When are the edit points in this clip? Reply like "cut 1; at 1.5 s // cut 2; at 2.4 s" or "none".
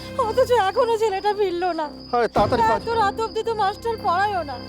none